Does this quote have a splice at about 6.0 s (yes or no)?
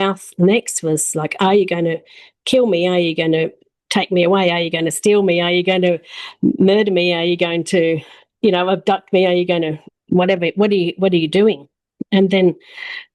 no